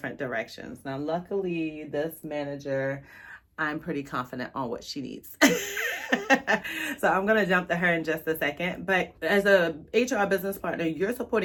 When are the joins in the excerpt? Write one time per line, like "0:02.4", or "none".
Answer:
none